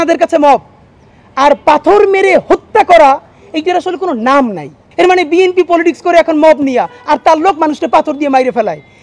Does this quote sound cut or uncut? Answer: cut